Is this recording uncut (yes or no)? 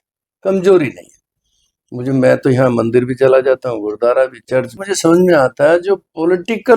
no